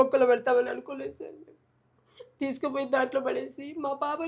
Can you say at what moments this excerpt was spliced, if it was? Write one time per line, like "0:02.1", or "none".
none